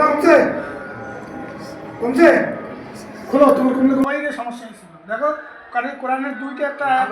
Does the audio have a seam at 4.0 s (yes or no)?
yes